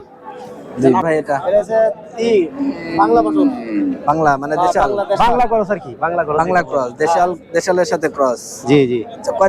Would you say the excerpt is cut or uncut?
cut